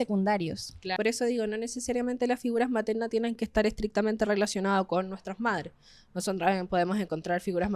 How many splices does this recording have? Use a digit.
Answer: 1